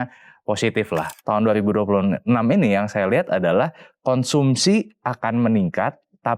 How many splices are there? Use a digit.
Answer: 1